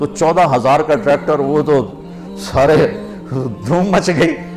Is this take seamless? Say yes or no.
yes